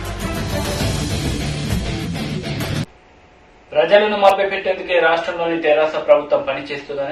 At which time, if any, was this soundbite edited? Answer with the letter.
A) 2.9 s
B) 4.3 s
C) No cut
A